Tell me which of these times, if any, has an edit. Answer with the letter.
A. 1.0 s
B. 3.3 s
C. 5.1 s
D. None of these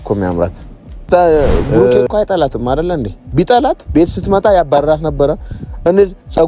A